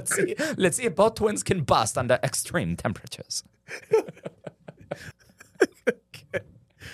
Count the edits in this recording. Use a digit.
1